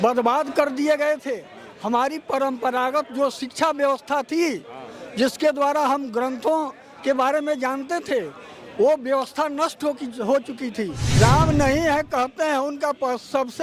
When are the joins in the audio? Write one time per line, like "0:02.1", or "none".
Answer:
0:11.0